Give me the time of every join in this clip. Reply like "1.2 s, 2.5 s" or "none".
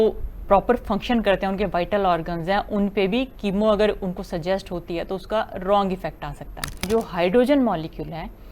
6.8 s